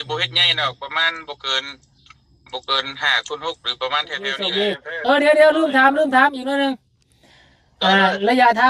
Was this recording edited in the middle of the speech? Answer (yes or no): yes